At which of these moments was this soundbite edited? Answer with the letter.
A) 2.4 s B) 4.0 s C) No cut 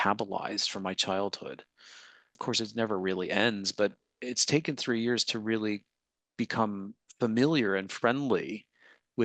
A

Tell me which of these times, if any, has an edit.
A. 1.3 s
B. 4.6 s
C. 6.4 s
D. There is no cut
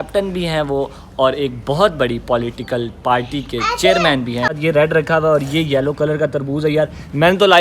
B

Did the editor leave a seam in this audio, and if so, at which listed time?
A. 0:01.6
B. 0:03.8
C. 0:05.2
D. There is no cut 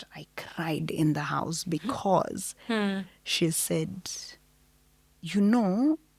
D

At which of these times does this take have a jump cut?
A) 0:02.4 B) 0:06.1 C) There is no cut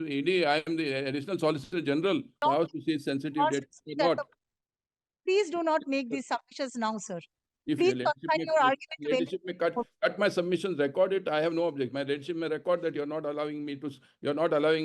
A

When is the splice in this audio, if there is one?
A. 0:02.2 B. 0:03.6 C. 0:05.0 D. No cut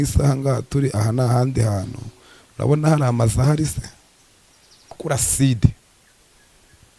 C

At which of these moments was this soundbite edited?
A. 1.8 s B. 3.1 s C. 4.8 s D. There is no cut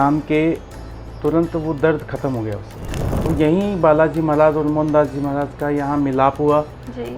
B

